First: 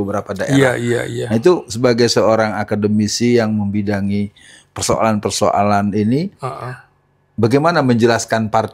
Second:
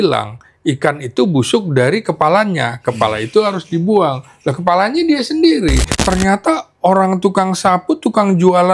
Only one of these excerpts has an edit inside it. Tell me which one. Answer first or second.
second